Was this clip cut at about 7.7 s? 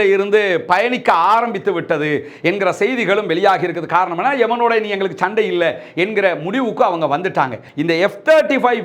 yes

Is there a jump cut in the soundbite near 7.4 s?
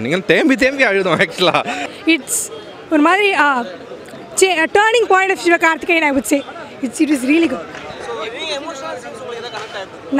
no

